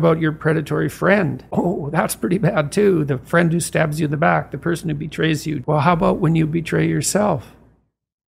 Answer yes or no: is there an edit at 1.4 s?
yes